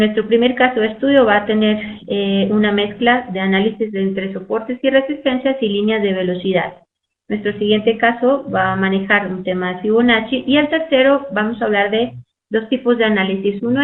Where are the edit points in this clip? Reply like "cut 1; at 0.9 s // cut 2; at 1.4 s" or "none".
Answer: cut 1; at 4.1 s